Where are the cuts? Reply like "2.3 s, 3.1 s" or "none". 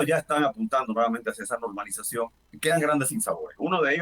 2.4 s